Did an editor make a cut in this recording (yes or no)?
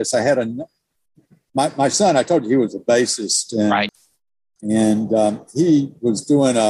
yes